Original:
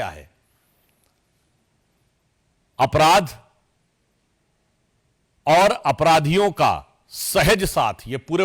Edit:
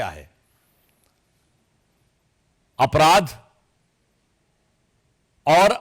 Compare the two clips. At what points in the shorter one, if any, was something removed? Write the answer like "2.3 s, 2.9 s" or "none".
none